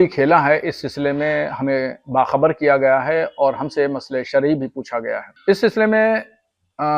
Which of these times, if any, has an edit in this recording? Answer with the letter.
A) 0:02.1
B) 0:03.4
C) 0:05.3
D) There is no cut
C